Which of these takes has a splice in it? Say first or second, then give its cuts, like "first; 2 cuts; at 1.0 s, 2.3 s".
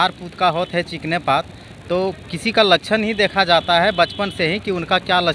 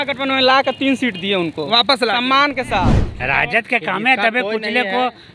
second; 1 cut; at 3.1 s